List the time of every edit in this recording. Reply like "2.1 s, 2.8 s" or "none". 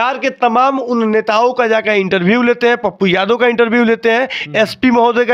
none